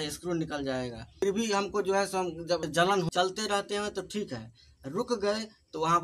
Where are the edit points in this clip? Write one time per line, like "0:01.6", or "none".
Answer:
0:03.1